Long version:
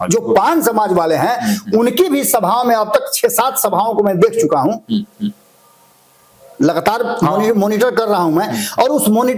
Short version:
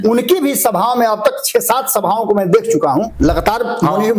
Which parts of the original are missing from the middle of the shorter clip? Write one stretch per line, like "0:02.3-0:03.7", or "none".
0:04.8-0:06.5